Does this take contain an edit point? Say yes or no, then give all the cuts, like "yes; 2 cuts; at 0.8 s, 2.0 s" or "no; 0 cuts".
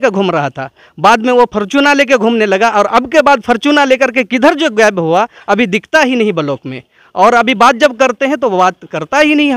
no; 0 cuts